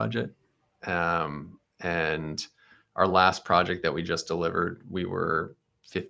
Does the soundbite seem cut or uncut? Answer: uncut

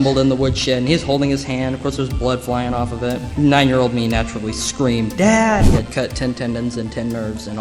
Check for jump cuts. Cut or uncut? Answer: cut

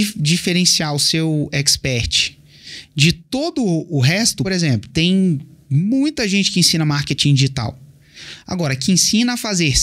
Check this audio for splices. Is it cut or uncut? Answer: cut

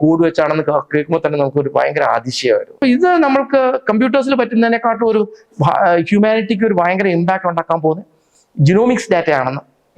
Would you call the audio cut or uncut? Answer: cut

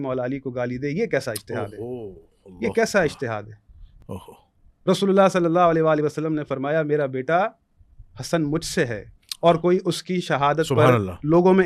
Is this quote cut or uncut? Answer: uncut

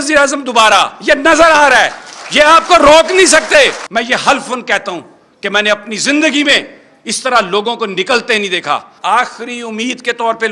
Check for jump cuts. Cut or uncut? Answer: cut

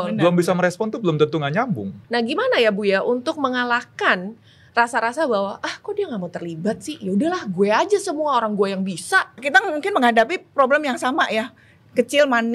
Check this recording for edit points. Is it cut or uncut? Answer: cut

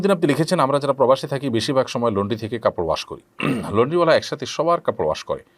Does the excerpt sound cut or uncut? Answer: uncut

